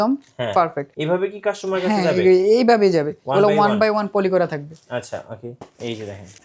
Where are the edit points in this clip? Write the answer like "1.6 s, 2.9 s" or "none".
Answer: 0.9 s, 5.5 s